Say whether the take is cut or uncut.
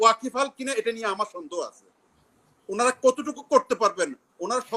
uncut